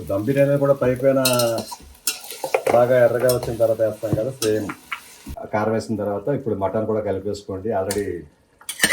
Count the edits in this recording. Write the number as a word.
one